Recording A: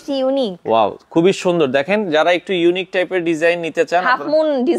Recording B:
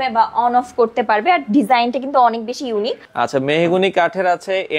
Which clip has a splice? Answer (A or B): B